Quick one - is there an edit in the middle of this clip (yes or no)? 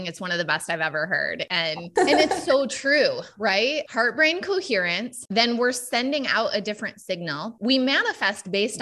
no